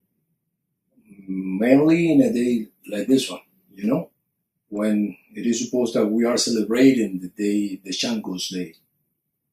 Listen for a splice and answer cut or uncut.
cut